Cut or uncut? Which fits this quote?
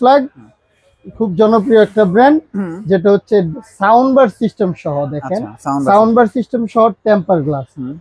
uncut